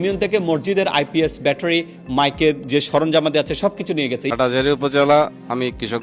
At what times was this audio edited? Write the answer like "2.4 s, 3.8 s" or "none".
4.2 s

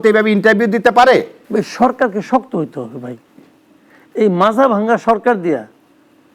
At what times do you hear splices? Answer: 1.4 s

